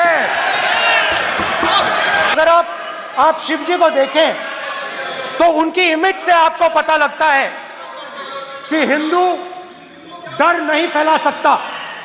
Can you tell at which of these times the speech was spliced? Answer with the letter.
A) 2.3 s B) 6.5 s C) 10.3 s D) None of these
A